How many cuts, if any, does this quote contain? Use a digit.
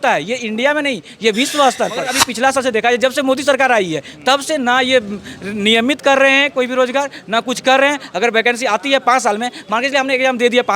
1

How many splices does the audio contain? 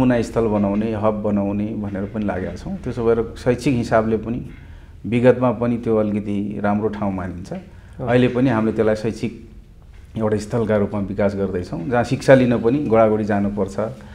0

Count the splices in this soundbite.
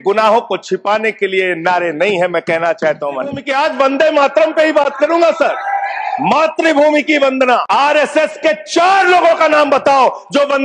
2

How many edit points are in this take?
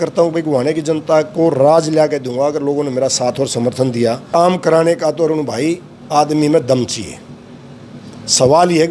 1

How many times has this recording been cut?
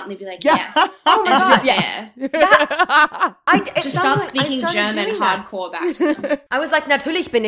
0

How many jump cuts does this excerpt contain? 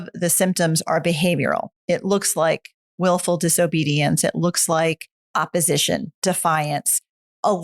2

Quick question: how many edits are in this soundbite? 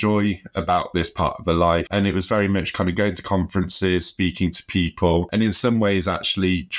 2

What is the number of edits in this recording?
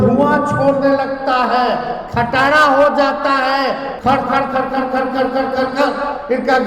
1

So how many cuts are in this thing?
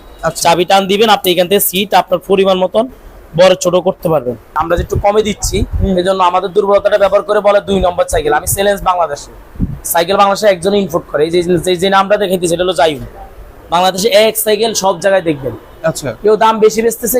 1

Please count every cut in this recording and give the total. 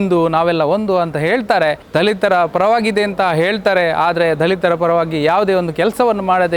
1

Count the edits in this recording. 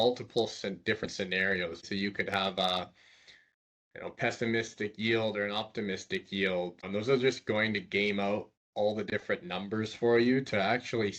2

